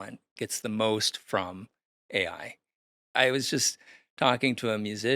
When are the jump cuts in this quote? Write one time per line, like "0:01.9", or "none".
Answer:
0:02.8